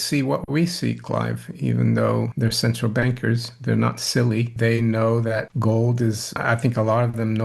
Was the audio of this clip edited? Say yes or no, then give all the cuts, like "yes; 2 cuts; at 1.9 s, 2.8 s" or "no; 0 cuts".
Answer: yes; 4 cuts; at 2.3 s, 4.5 s, 5.5 s, 6.3 s